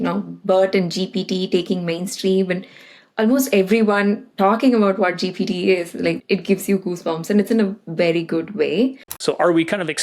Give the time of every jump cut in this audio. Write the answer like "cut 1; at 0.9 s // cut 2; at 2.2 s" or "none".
cut 1; at 6.2 s // cut 2; at 9.1 s